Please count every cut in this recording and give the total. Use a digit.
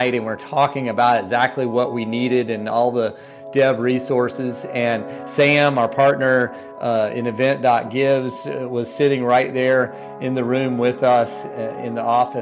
0